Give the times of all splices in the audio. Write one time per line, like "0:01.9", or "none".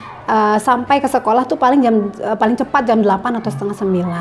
none